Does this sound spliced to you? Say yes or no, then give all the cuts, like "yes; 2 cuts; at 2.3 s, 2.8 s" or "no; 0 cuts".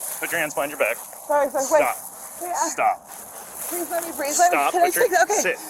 no; 0 cuts